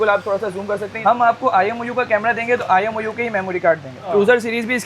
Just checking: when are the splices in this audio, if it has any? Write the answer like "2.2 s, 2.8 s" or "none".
1.0 s, 4.0 s